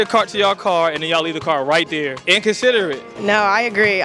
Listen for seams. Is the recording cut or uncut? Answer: cut